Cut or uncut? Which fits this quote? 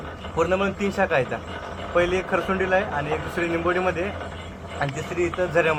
uncut